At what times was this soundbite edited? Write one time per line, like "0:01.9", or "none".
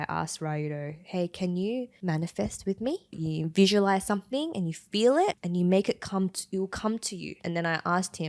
0:01.9
0:03.2
0:05.4
0:07.4